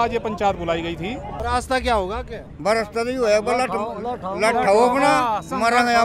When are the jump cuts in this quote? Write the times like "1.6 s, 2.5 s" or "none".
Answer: 1.4 s

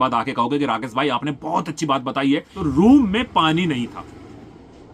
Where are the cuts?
2.5 s

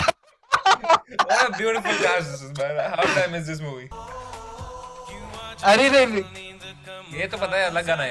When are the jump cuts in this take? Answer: 3.8 s

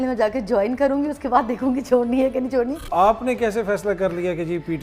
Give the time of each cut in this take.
2.9 s

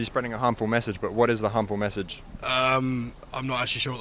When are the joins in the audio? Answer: none

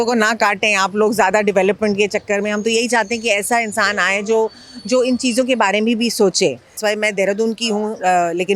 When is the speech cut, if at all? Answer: 6.8 s

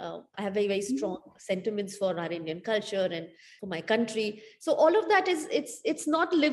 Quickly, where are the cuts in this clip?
3.5 s

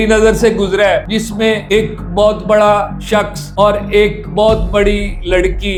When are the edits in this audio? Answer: none

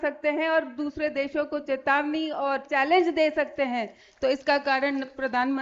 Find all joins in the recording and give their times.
none

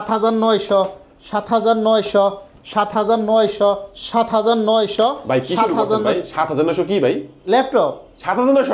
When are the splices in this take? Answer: none

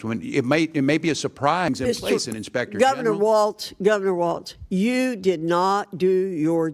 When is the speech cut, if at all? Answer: 1.7 s

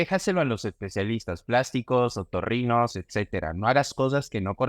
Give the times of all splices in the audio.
none

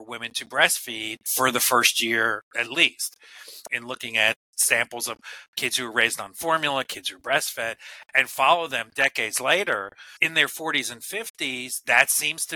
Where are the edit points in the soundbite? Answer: 1.3 s, 3.7 s, 4.5 s, 10.2 s

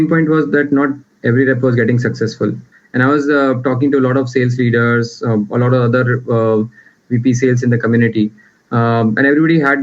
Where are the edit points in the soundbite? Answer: 2.7 s

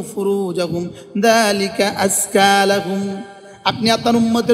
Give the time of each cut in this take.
none

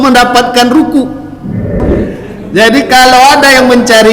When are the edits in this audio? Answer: 1.8 s

